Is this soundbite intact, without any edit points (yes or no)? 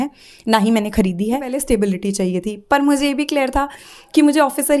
no